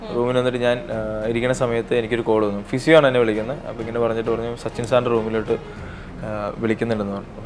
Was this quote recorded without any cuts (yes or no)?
yes